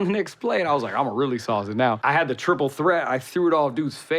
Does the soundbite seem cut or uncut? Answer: cut